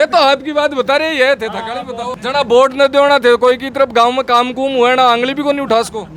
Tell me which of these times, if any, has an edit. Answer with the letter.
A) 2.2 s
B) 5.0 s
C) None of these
A